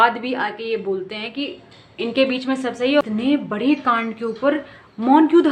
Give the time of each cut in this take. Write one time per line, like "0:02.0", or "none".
0:03.0